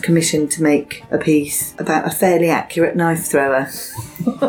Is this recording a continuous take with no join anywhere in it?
no; 2 cuts; at 1.0 s, 1.8 s

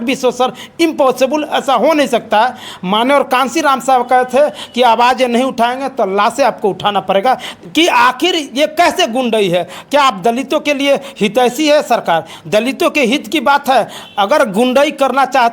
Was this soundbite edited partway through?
yes; 1 cut; at 7.6 s

